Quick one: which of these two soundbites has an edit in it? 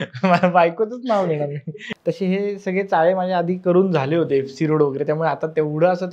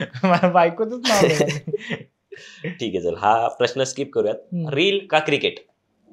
first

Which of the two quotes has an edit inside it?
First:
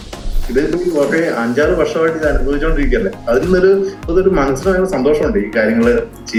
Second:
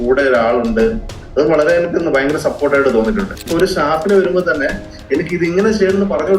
second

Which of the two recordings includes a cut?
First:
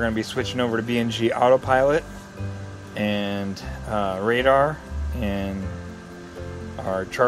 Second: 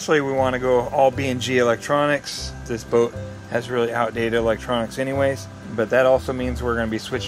second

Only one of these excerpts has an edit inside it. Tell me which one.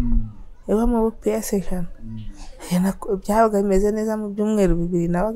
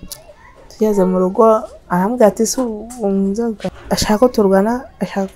second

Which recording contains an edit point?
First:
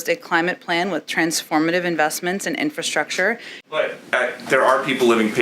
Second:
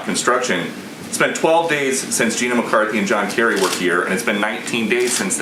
first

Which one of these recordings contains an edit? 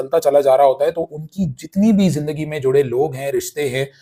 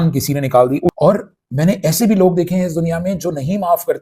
second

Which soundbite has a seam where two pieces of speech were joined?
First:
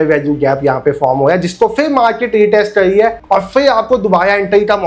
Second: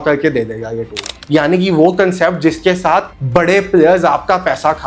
second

